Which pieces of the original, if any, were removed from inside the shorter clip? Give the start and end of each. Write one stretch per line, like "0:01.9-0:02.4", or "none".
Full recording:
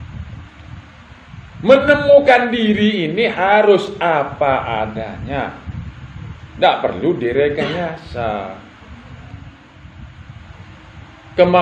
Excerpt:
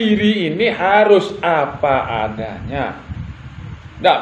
none